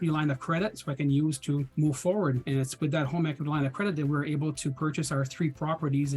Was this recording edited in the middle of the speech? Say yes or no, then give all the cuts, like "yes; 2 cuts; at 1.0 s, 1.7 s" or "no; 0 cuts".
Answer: yes; 2 cuts; at 1.7 s, 2.4 s